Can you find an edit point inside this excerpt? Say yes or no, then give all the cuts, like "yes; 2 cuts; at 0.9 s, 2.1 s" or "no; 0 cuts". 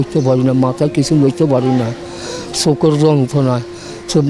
no; 0 cuts